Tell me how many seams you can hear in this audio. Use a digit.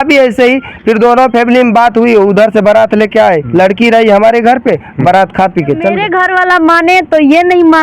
1